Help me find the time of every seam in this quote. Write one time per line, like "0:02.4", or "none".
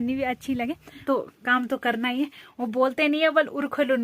0:01.0